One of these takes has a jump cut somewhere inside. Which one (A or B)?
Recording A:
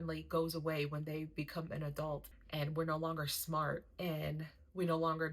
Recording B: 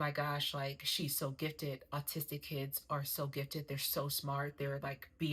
A